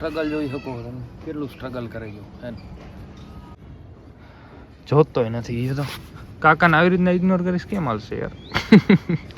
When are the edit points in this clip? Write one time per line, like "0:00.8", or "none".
0:03.6